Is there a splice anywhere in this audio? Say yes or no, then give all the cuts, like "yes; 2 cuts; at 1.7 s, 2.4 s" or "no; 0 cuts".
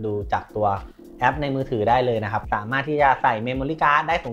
yes; 1 cut; at 2.4 s